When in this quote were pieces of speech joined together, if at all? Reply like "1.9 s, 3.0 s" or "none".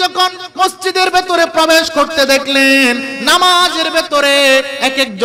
none